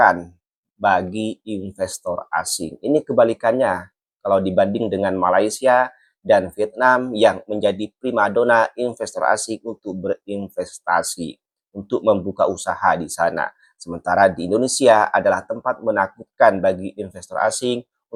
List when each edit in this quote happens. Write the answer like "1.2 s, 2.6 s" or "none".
none